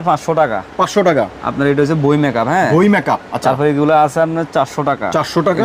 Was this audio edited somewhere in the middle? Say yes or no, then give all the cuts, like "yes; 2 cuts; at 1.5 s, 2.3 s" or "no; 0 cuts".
no; 0 cuts